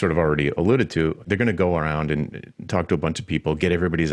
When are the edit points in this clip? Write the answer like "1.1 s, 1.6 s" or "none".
1.2 s